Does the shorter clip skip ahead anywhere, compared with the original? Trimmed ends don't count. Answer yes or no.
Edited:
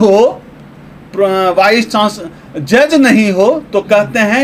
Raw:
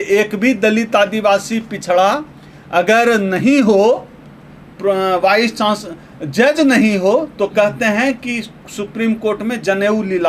no